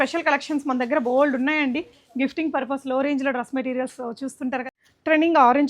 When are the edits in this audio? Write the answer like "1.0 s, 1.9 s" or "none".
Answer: 4.7 s